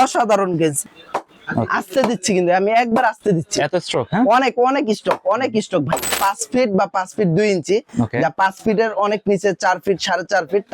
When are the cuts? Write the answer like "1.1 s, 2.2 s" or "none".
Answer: 0.8 s, 6.1 s